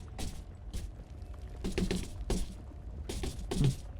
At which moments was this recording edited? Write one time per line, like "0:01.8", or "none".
none